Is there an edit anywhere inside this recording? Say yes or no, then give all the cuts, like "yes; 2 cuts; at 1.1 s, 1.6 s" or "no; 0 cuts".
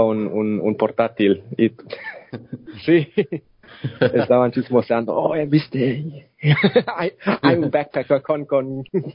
yes; 1 cut; at 2.2 s